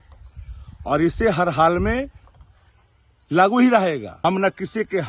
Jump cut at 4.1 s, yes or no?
yes